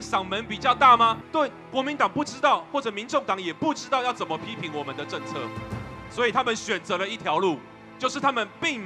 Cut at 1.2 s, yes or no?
yes